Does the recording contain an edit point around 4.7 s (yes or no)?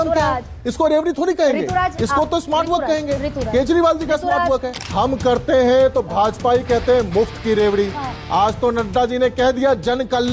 yes